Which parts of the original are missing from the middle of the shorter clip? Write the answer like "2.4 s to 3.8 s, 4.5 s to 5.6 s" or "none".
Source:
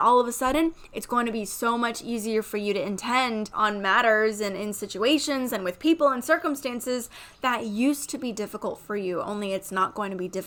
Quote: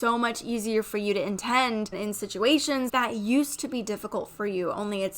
3.5 s to 4.5 s, 5.5 s to 7.4 s